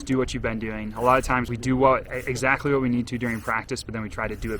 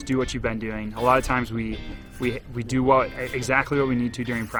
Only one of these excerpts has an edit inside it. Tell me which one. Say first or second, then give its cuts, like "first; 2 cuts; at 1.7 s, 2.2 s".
first; 1 cut; at 1.5 s